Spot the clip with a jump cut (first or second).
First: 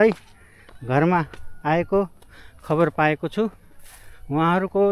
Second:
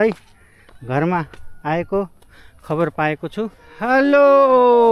second